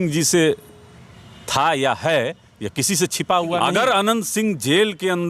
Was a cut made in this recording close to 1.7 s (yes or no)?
no